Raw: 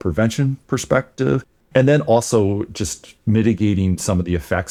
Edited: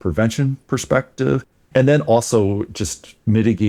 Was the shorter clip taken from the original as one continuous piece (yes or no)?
yes